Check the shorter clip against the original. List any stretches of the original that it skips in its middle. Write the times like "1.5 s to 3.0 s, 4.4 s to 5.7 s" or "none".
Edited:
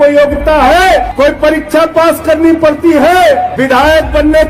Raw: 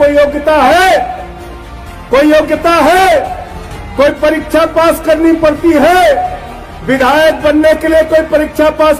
1.1 s to 3.9 s, 6.3 s to 6.8 s

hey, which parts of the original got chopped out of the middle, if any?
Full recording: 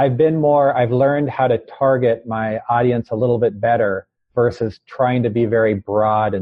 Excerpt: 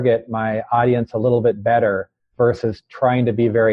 none

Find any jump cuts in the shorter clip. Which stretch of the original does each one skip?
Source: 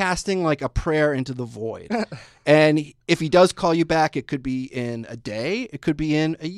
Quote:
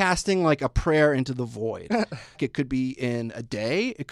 2.4 s to 4.1 s

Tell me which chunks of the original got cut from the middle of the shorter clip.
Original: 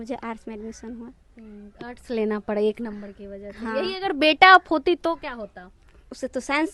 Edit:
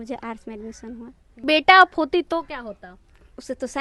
1.4 s to 4.2 s

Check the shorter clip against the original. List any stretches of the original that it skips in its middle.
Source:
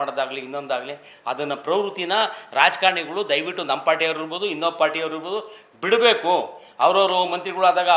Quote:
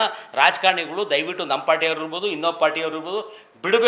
none

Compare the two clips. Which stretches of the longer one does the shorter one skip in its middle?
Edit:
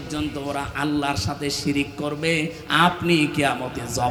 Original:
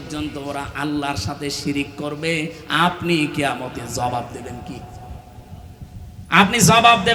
none

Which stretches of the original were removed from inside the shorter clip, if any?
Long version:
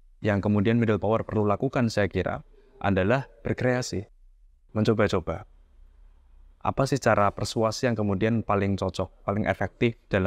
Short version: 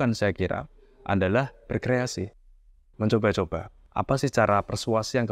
5.5 s to 6.5 s

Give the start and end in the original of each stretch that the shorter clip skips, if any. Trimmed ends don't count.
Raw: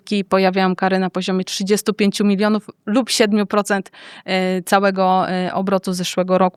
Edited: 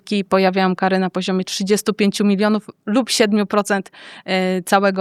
none

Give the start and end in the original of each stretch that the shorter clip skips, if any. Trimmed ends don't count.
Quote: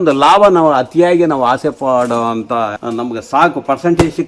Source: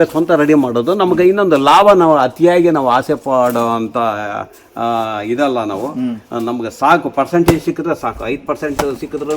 4.2 s to 6.3 s

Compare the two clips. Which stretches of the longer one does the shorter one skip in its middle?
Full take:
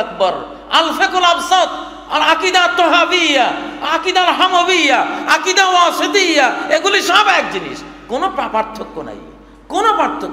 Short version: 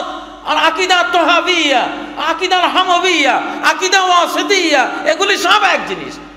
none

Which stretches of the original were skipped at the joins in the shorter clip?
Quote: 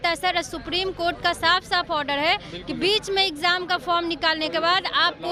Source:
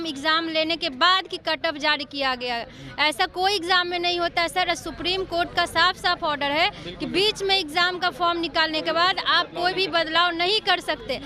none

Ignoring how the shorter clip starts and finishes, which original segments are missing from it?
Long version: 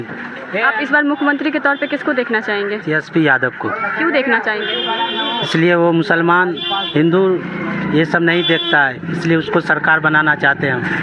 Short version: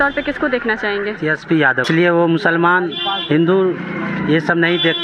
3.5 s to 5.5 s

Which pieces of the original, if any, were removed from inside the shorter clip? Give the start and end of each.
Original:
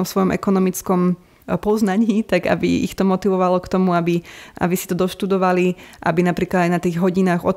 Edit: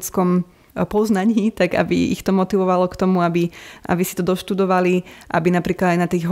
none

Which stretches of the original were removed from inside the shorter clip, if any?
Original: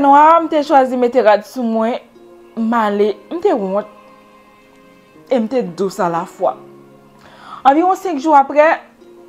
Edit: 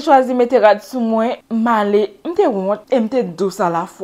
2.0 s to 2.5 s, 3.9 s to 5.2 s

